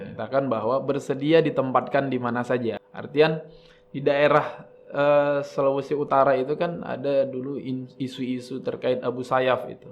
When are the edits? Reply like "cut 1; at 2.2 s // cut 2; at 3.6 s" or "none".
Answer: cut 1; at 2.9 s